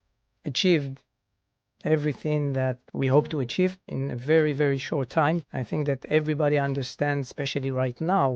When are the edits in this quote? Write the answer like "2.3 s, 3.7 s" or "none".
2.8 s, 3.9 s, 5.5 s